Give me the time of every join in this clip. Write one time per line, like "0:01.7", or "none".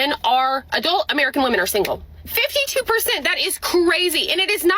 0:02.2